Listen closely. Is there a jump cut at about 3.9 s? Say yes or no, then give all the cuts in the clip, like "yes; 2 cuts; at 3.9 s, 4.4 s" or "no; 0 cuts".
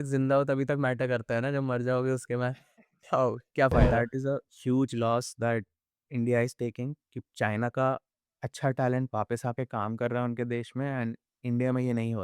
yes; 1 cut; at 3.9 s